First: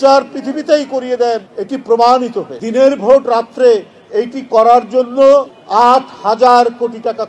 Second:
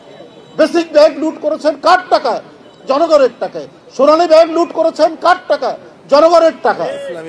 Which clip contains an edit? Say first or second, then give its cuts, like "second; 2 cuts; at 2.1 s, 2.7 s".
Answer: first; 3 cuts; at 1.5 s, 2.6 s, 5.6 s